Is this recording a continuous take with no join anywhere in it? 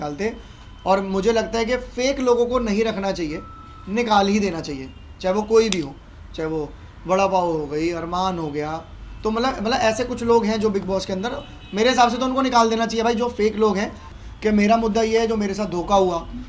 no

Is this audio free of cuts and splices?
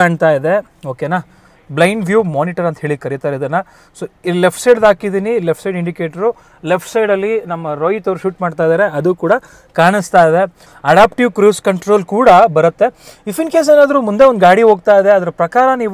no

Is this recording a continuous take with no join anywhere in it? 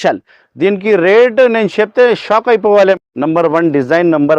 no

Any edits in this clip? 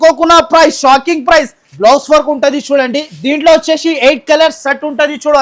yes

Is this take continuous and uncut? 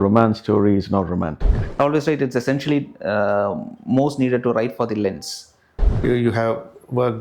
no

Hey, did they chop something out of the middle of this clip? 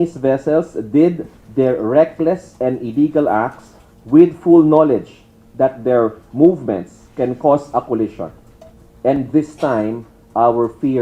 no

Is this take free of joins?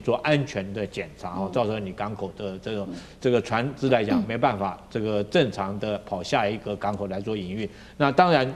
yes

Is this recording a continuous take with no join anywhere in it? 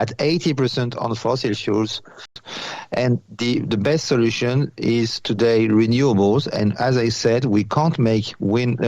no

